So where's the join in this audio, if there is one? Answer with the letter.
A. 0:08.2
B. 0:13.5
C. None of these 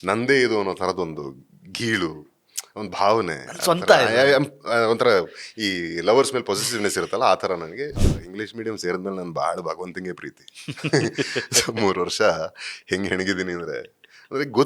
A